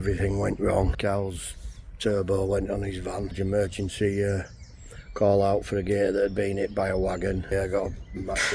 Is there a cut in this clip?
yes; 3 cuts; at 0.9 s, 3.3 s, 7.5 s

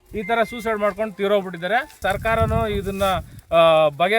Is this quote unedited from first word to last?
no; 1 cut; at 2.0 s

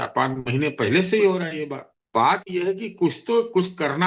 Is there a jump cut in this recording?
yes; 1 cut; at 2.0 s

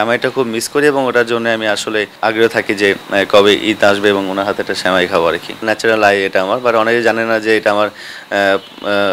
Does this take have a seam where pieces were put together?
yes; 2 cuts; at 2.1 s, 5.6 s

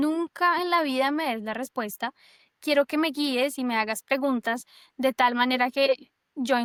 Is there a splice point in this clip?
no; 0 cuts

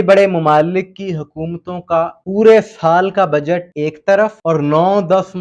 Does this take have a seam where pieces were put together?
yes; 3 cuts; at 2.2 s, 3.7 s, 4.4 s

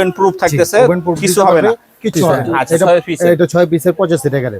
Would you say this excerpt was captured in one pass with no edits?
no; 1 cut; at 2.5 s

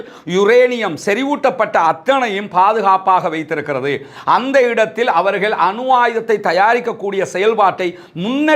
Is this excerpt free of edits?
yes; 0 cuts

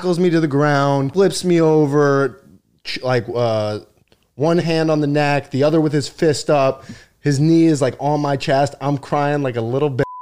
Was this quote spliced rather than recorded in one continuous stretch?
yes; 1 cut; at 1.1 s

